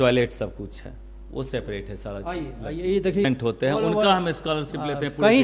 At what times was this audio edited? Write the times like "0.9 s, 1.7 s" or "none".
3.2 s